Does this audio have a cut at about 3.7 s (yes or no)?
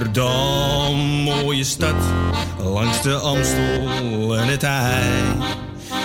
no